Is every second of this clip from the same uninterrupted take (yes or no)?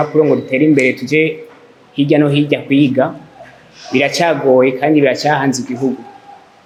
yes